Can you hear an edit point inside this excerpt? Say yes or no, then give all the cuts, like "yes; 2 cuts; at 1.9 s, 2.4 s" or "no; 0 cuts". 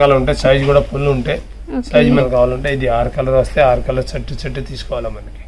yes; 1 cut; at 2.2 s